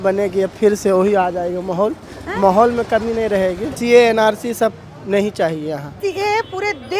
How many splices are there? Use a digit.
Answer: 2